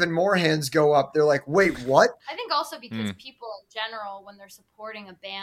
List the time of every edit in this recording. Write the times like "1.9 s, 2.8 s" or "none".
2.2 s